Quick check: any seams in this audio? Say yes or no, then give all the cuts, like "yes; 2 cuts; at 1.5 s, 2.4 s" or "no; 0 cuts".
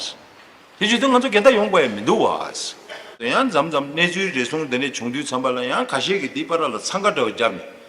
yes; 1 cut; at 3.3 s